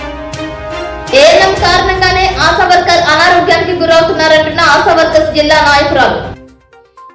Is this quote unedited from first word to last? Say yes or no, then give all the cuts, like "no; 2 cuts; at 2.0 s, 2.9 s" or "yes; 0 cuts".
yes; 0 cuts